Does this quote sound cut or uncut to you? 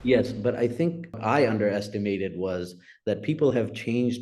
cut